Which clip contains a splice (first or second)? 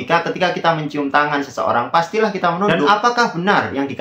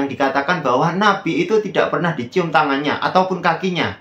first